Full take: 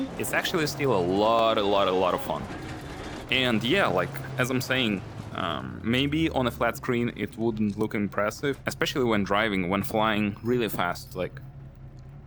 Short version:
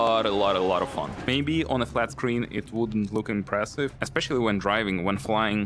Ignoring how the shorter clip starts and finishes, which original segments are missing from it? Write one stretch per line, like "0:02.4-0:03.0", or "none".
0:02.6-0:05.9